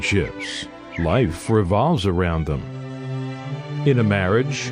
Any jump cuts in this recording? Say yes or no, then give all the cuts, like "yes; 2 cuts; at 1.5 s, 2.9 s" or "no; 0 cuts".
no; 0 cuts